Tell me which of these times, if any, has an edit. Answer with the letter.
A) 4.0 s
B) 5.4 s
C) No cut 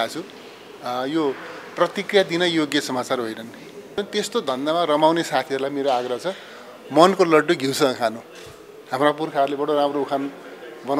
A